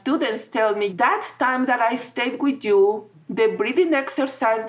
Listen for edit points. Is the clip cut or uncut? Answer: cut